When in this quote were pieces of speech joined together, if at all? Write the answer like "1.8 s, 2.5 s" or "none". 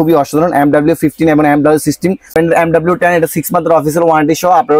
2.3 s